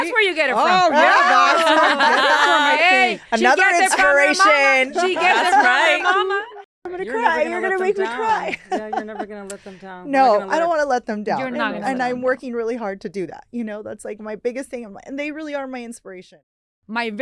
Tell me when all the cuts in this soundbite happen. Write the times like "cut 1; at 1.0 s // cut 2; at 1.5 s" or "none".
cut 1; at 6.5 s // cut 2; at 16.3 s

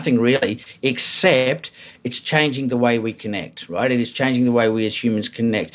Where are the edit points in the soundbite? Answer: none

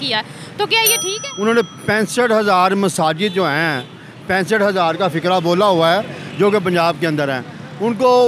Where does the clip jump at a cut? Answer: cut 1; at 1.1 s

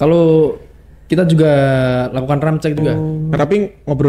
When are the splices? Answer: cut 1; at 2.9 s

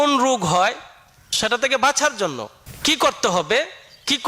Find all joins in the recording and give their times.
cut 1; at 1.3 s // cut 2; at 2.4 s

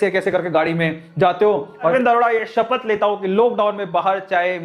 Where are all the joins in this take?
cut 1; at 1.9 s

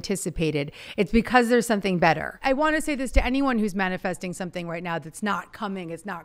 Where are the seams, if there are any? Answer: cut 1; at 2.4 s

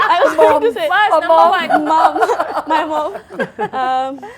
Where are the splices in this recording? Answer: none

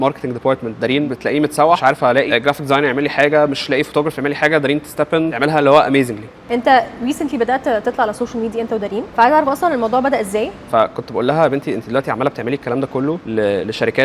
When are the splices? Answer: cut 1; at 1.1 s // cut 2; at 1.9 s // cut 3; at 5.3 s // cut 4; at 6.5 s // cut 5; at 9.1 s // cut 6; at 10.6 s // cut 7; at 13.2 s

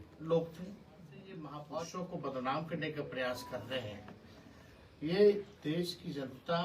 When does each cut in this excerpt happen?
cut 1; at 1.6 s

